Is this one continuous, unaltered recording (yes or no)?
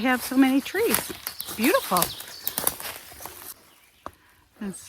no